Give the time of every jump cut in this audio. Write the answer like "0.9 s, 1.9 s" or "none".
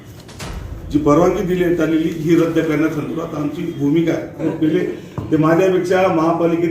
4.4 s

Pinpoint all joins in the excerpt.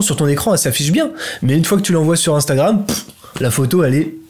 none

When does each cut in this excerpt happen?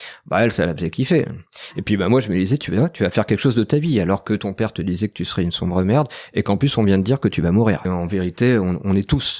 7.9 s

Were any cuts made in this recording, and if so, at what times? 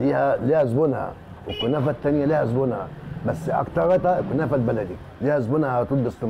none

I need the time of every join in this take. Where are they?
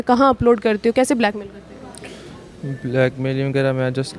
none

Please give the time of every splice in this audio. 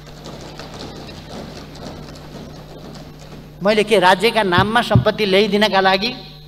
none

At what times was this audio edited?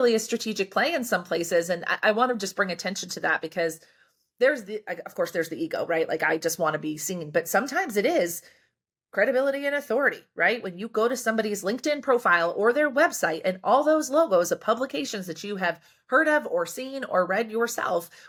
none

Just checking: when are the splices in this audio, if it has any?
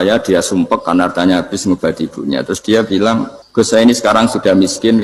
3.4 s

